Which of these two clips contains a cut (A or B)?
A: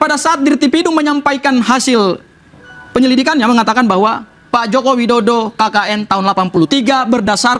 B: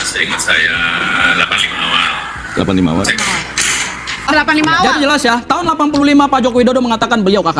B